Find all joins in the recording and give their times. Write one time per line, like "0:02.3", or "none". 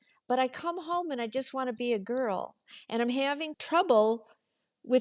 0:03.5

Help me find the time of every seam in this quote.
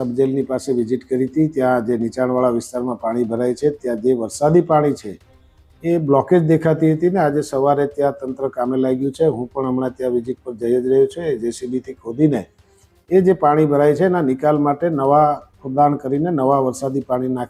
none

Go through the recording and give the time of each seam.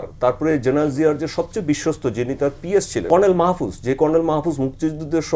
0:03.0

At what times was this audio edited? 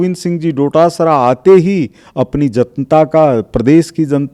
none

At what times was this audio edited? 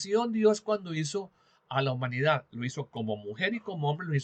none

